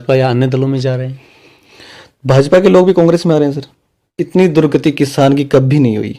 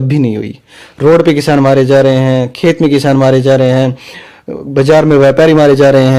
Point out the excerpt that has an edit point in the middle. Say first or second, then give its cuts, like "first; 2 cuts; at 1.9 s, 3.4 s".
first; 1 cut; at 4.2 s